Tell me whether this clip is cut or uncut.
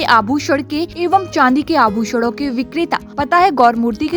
cut